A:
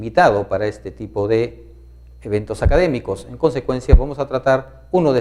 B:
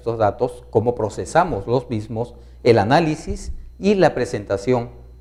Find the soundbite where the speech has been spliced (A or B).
A